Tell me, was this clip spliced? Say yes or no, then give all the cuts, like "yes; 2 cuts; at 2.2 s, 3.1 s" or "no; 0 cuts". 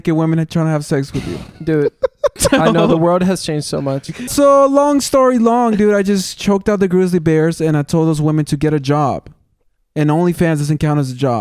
yes; 1 cut; at 4.3 s